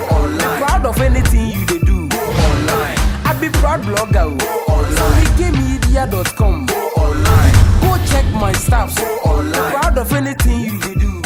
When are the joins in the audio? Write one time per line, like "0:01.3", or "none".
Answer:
none